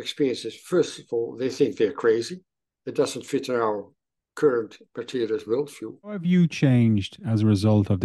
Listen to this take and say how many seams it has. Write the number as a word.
one